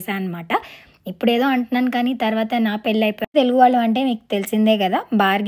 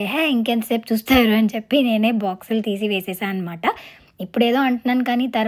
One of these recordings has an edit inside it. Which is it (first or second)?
first